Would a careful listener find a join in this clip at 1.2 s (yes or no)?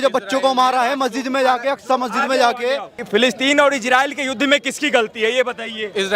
no